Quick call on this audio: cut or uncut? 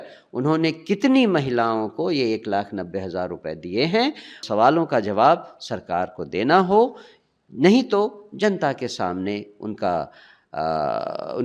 cut